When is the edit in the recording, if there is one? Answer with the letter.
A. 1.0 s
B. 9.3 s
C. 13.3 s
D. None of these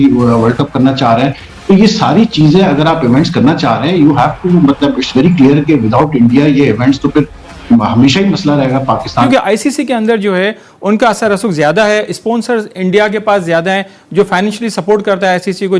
B